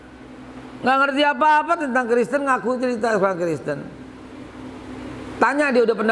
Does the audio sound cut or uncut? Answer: uncut